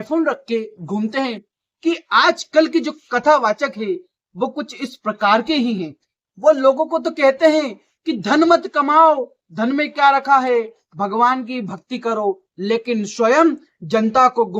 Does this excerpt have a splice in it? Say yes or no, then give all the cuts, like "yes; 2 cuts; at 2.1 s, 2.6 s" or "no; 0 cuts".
yes; 1 cut; at 1.5 s